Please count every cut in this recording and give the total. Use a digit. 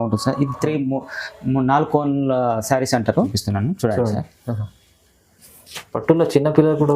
1